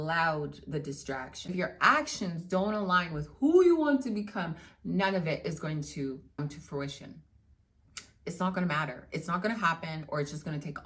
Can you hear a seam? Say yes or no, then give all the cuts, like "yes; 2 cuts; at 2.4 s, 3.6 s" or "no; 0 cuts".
yes; 2 cuts; at 1.5 s, 6.4 s